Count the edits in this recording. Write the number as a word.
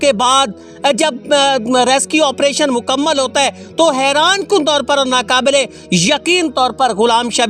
zero